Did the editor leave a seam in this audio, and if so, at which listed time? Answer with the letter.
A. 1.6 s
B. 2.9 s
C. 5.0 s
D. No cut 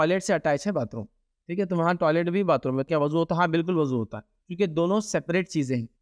B